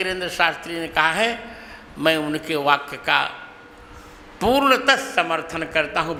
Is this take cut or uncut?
uncut